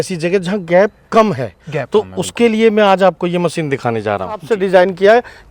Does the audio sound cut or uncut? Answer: cut